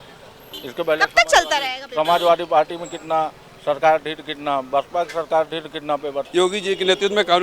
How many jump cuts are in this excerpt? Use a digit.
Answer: 1